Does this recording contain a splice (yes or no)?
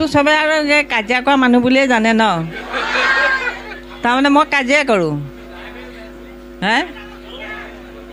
no